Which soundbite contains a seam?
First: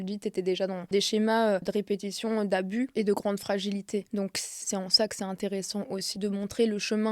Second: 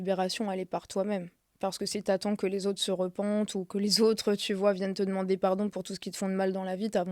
first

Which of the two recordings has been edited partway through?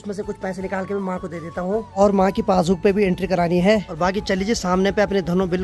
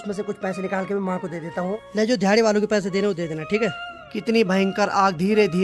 second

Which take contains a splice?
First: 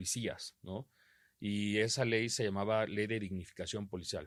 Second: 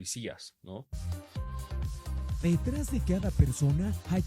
second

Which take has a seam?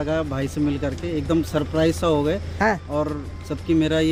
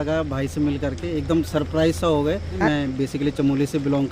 second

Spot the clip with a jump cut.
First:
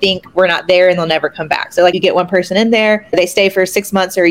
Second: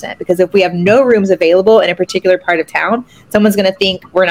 first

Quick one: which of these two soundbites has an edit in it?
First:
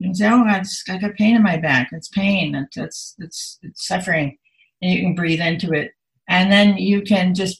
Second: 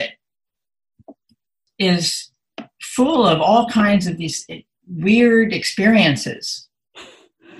second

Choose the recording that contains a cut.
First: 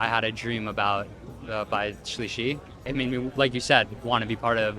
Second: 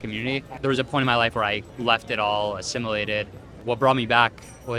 first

